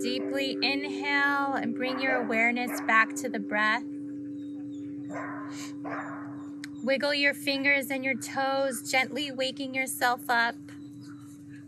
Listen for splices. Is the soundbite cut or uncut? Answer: uncut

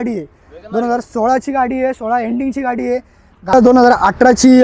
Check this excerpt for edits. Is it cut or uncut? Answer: cut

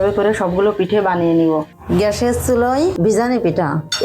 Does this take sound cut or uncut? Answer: cut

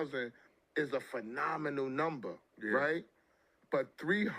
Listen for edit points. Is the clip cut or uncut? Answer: cut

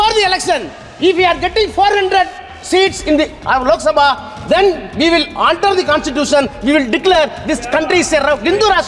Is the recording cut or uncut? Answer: uncut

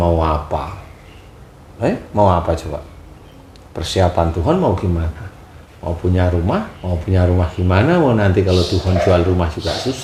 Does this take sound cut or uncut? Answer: uncut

